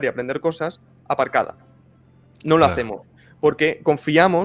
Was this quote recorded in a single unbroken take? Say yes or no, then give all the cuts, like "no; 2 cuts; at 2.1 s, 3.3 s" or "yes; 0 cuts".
yes; 0 cuts